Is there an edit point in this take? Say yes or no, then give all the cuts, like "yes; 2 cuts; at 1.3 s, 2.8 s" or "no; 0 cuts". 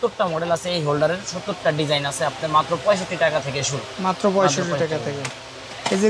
no; 0 cuts